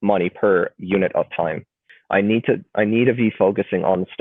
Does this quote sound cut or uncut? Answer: cut